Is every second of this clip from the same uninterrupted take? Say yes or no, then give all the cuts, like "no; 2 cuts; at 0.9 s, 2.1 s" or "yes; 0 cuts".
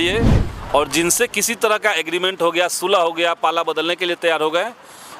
yes; 0 cuts